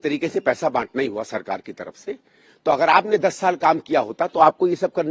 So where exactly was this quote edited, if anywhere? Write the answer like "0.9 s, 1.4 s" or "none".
none

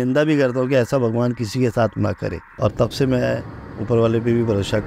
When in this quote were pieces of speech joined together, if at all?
2.5 s

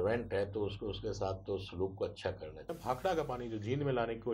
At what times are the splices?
2.7 s

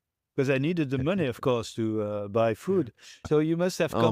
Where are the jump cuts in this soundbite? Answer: 3.1 s

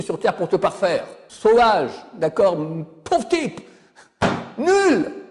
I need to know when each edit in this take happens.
1.3 s

